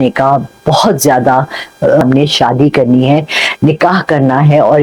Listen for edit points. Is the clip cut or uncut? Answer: cut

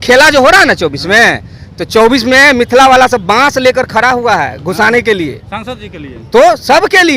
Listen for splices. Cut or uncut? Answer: uncut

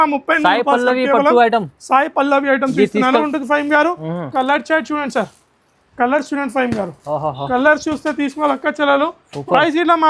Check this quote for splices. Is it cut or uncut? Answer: cut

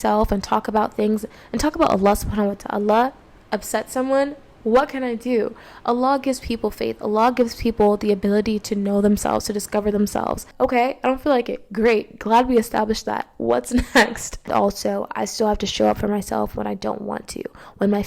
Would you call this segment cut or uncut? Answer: cut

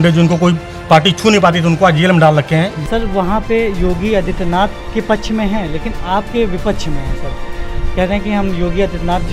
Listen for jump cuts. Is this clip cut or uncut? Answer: cut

